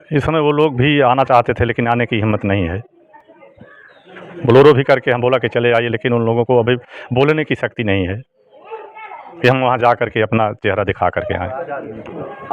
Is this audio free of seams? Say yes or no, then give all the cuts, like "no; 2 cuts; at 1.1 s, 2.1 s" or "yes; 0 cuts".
yes; 0 cuts